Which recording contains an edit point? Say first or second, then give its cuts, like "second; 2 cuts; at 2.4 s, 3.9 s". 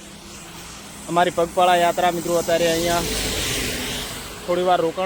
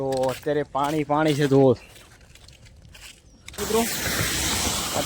second; 1 cut; at 3.6 s